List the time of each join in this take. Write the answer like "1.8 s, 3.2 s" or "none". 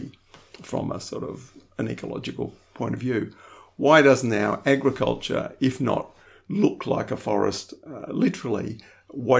none